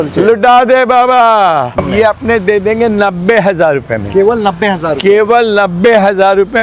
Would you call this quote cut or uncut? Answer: cut